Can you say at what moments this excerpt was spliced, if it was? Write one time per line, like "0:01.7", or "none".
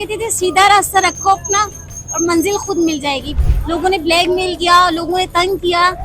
0:03.3